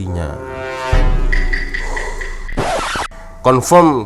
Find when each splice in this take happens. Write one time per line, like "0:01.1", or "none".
0:02.9